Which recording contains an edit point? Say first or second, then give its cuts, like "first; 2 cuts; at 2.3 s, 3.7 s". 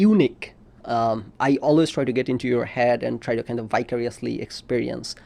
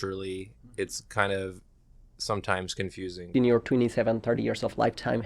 second; 1 cut; at 3.3 s